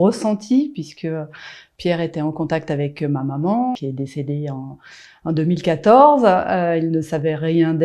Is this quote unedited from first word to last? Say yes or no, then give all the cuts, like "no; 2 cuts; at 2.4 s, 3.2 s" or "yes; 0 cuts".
no; 1 cut; at 3.8 s